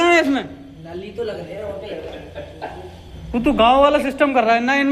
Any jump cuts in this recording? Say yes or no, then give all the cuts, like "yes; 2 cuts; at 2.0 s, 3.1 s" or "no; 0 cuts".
no; 0 cuts